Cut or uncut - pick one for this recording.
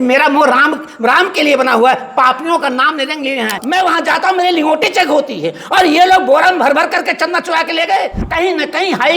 cut